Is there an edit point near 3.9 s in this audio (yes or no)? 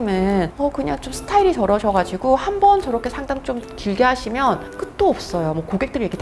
no